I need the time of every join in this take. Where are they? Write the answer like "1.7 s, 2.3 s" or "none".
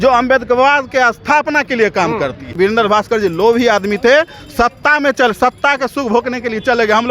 2.5 s